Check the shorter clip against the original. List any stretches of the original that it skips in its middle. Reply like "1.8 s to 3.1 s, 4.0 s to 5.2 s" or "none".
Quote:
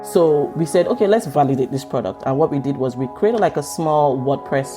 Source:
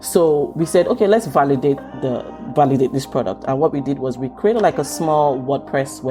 1.3 s to 2.5 s